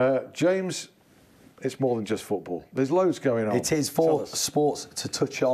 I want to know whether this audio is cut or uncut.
cut